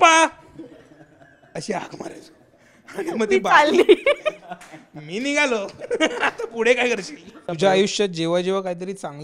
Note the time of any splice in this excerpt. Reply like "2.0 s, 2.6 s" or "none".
7.4 s